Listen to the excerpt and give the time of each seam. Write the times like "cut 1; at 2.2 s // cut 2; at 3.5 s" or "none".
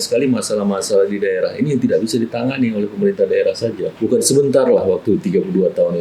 cut 1; at 3.9 s